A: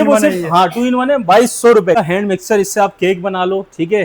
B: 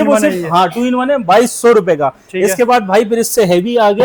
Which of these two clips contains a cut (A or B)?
A